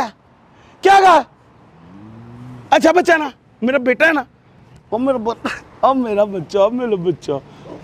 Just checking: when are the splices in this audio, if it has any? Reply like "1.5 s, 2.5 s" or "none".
none